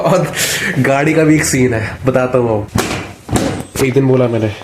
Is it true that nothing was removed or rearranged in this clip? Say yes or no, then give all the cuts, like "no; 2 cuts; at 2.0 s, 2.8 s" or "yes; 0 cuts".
no; 1 cut; at 2.7 s